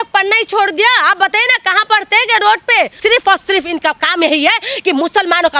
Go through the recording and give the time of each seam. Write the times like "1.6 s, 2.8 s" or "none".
3.0 s